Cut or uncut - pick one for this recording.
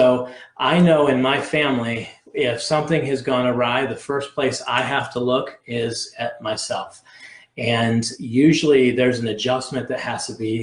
uncut